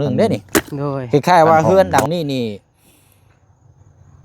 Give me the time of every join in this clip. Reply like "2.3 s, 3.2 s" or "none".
1.0 s